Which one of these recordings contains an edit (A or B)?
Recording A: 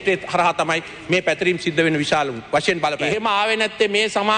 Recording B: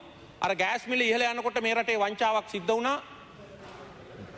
A